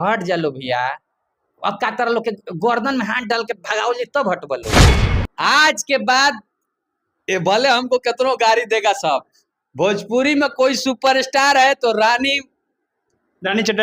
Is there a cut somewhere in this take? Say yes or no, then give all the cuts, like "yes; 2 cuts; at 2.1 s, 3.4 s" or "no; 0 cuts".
yes; 2 cuts; at 4.6 s, 5.1 s